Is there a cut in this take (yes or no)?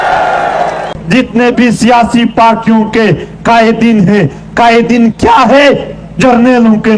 yes